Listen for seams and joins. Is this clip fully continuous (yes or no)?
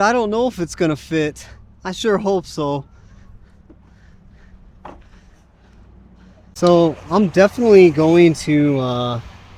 yes